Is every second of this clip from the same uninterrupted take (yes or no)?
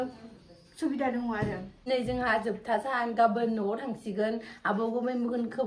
no